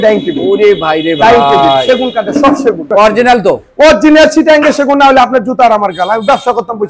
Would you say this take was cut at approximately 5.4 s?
no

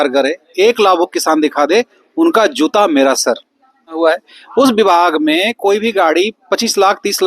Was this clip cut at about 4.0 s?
yes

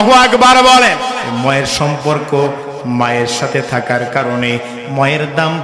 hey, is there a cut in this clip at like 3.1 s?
no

